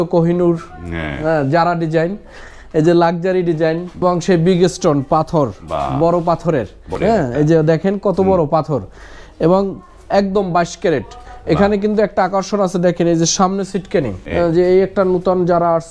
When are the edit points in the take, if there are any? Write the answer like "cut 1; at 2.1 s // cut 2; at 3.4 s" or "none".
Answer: cut 1; at 4.0 s // cut 2; at 6.9 s // cut 3; at 14.2 s